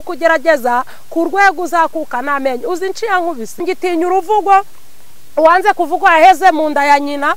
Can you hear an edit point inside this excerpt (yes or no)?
yes